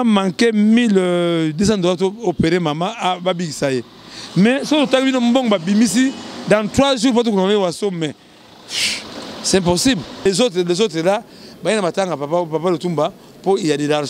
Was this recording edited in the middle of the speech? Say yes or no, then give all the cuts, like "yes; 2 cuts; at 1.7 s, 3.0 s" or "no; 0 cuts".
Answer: yes; 1 cut; at 10.2 s